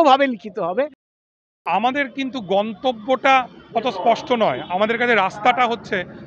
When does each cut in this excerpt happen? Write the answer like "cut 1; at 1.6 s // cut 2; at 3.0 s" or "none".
cut 1; at 0.9 s